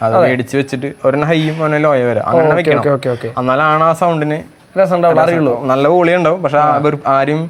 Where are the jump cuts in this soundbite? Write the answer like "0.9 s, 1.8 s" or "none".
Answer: none